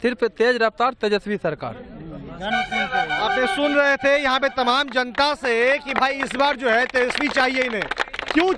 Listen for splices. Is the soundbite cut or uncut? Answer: uncut